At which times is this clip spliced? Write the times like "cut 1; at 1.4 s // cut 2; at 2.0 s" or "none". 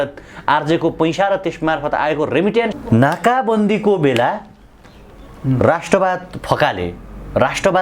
cut 1; at 2.7 s